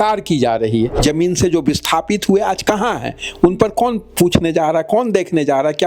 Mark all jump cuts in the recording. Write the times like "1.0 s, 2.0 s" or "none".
1.0 s